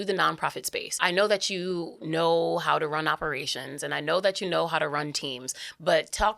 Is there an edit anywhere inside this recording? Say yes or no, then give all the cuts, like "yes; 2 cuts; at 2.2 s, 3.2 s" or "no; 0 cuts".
yes; 1 cut; at 1.0 s